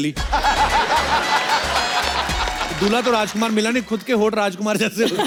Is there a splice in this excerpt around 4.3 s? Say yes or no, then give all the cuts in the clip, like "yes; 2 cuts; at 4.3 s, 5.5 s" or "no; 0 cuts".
no; 0 cuts